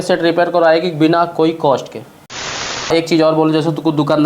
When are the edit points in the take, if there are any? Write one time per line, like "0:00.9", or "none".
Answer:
0:02.3